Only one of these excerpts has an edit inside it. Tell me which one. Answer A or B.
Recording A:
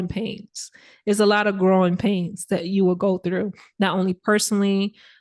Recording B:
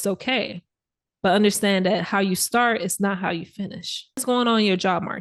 B